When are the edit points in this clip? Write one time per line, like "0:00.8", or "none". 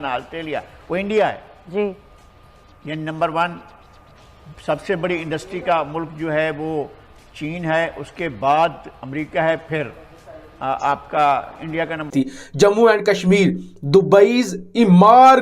0:12.0